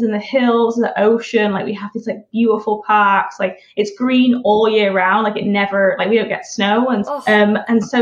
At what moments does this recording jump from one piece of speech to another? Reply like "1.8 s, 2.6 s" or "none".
7.1 s